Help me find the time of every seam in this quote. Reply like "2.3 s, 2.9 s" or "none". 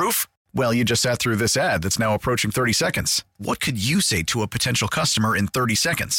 none